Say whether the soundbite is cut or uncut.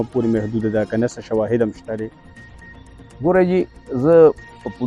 uncut